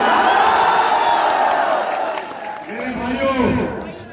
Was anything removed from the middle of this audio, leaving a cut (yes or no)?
no